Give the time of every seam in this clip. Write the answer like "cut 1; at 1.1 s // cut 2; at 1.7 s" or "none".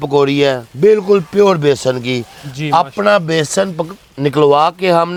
none